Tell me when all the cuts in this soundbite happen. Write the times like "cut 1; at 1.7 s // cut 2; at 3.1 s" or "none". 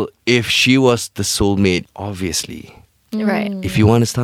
cut 1; at 1.9 s